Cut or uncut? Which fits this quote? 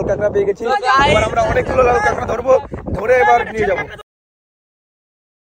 uncut